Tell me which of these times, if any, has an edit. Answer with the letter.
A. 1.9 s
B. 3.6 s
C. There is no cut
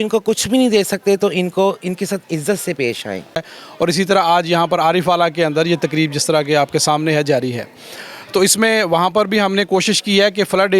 B